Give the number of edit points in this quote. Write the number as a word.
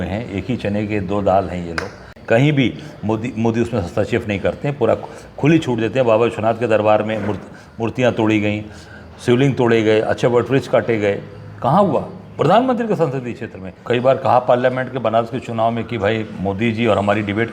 two